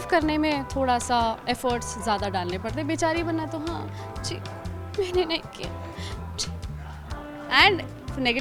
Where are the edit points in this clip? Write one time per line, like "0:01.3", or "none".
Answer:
none